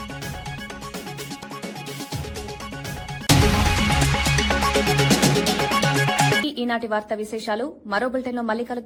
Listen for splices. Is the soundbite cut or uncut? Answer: uncut